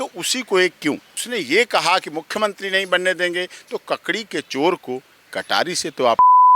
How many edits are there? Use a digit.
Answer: 1